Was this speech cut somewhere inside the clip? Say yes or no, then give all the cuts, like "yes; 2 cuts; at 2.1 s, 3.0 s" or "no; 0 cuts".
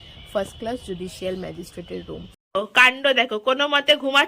yes; 1 cut; at 2.5 s